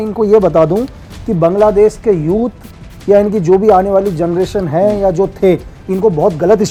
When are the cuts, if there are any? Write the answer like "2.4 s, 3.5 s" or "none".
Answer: none